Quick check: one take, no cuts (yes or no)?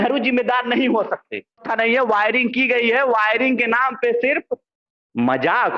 no